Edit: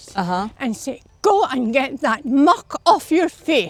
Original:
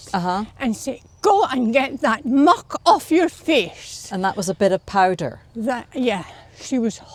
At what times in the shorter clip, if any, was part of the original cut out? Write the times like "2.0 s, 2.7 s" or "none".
none